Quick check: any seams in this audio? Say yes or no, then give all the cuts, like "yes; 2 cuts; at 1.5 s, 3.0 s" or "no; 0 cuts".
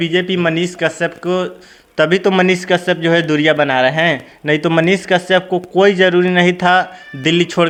no; 0 cuts